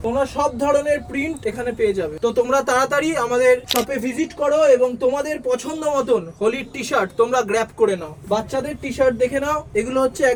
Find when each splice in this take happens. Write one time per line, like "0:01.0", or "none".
none